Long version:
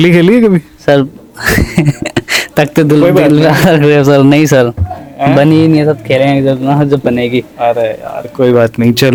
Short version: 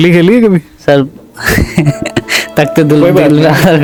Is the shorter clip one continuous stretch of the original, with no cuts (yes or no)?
yes